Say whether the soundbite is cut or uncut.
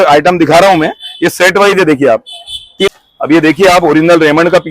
cut